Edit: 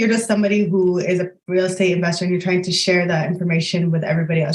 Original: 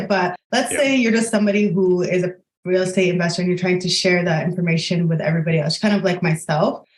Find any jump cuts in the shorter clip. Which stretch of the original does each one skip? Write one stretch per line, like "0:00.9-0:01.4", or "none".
0:02.4-0:02.5